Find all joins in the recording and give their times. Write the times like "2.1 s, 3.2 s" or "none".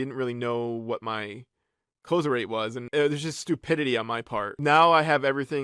2.8 s, 4.5 s